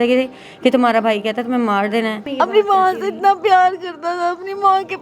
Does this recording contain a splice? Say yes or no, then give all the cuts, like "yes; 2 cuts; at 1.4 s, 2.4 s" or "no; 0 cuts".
yes; 1 cut; at 2.2 s